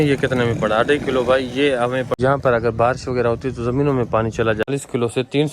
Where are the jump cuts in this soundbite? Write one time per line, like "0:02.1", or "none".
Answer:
0:02.1
0:04.7